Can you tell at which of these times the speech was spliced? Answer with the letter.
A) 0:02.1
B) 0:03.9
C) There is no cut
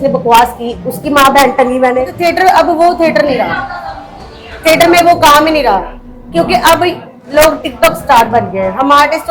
A